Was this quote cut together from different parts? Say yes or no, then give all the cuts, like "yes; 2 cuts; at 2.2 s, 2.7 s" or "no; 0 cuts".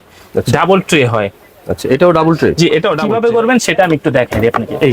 yes; 1 cut; at 3.0 s